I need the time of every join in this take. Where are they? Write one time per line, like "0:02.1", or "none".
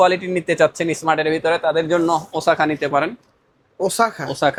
none